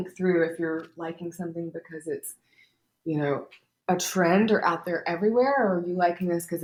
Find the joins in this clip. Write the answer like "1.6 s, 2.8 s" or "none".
none